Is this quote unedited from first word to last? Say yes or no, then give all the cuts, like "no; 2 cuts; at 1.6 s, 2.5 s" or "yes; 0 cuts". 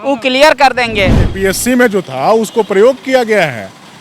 no; 1 cut; at 1.2 s